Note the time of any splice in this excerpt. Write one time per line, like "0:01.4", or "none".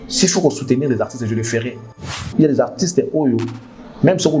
0:02.2